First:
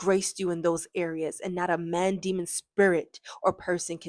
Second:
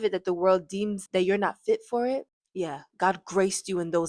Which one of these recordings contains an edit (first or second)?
second